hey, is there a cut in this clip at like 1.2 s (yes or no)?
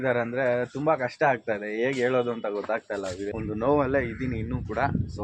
no